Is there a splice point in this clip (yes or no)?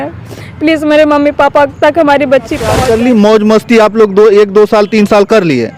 yes